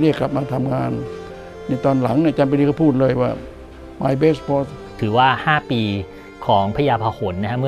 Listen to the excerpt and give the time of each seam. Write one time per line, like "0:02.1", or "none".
0:05.0